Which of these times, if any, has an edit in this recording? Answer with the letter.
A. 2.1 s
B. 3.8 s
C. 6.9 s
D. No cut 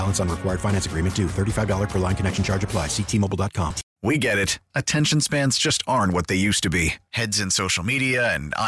B